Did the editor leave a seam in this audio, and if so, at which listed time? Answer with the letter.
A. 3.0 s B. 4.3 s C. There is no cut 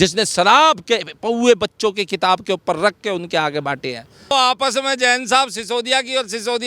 B